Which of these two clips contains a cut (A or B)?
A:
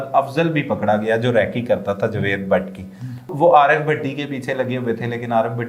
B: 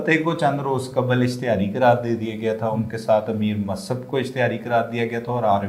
A